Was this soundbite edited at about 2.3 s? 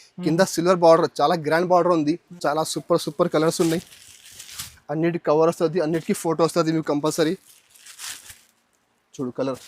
yes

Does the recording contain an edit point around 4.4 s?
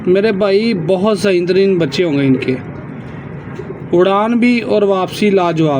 no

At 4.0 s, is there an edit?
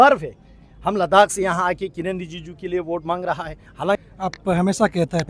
yes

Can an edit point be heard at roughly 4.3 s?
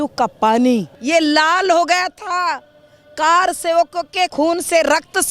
yes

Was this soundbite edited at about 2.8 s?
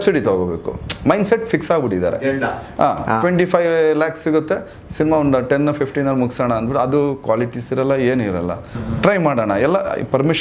no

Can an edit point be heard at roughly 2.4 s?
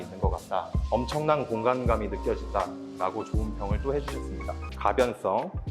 no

